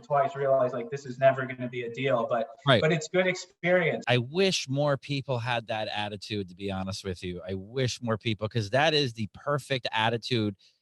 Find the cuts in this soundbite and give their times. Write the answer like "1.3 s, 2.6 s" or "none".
4.0 s